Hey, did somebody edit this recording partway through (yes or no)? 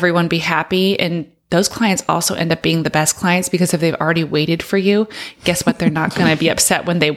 no